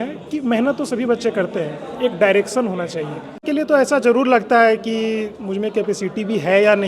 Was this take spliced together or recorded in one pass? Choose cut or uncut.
cut